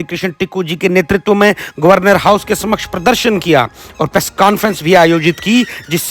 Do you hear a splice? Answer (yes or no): no